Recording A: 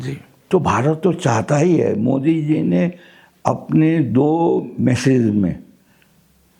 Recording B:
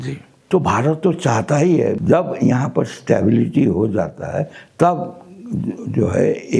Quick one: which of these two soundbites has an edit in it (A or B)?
B